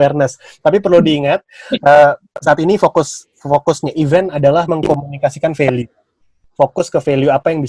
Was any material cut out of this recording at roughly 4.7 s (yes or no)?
yes